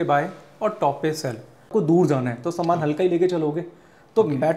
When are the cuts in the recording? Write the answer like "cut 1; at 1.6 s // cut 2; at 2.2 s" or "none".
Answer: cut 1; at 1.7 s